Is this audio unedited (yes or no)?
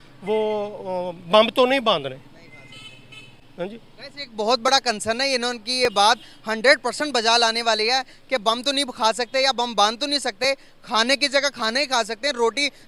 yes